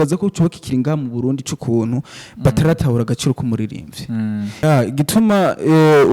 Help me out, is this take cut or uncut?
cut